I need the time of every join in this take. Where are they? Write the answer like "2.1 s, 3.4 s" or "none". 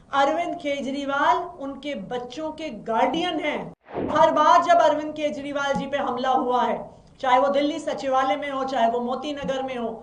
4.1 s

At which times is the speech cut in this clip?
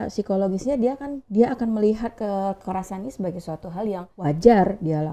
1.1 s, 4.1 s

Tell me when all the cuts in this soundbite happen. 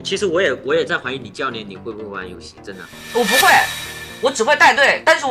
none

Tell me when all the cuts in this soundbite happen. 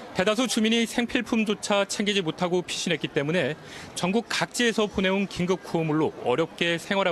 1.1 s

